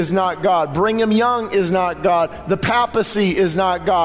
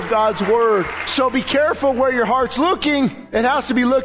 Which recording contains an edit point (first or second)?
second